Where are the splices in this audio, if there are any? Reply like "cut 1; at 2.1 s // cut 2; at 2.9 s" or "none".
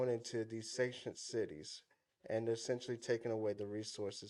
none